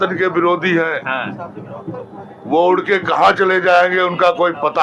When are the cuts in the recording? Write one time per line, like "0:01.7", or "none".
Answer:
none